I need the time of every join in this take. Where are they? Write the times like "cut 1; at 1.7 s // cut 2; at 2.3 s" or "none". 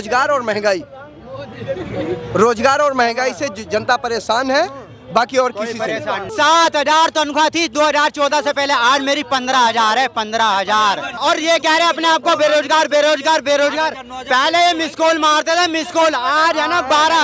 cut 1; at 6.3 s // cut 2; at 11.2 s